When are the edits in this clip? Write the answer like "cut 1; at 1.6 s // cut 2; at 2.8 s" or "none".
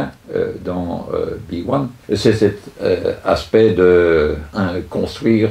cut 1; at 2.0 s